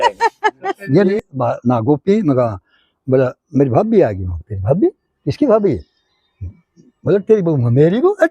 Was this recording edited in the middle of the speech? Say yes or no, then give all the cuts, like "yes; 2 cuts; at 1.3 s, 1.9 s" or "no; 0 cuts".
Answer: yes; 1 cut; at 1.1 s